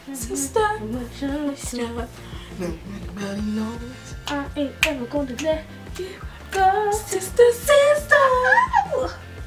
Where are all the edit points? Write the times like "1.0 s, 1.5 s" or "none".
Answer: none